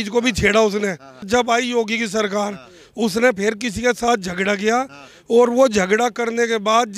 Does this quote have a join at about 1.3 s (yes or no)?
yes